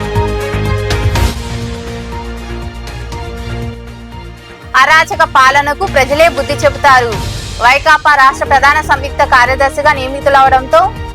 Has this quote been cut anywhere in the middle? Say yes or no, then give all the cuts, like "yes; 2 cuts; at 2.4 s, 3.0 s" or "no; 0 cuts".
yes; 1 cut; at 1.0 s